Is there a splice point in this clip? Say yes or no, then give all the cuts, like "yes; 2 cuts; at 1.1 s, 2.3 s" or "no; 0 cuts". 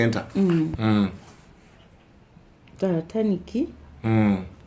no; 0 cuts